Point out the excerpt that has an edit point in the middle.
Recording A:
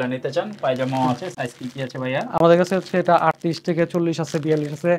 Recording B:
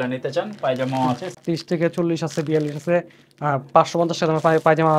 B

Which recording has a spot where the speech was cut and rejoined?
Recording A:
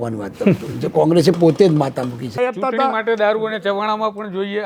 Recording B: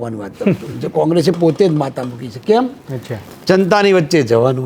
A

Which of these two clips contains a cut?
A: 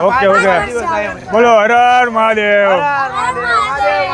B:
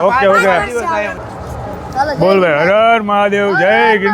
B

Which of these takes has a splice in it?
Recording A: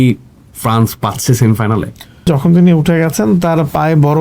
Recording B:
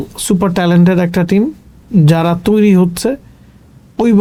A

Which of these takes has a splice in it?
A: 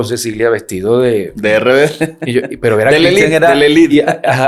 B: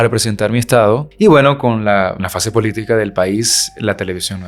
B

